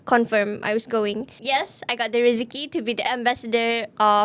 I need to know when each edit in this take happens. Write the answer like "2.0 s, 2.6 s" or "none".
1.3 s, 3.1 s